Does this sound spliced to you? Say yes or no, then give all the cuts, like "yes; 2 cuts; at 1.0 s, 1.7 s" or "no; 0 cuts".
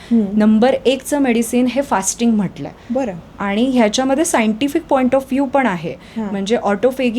no; 0 cuts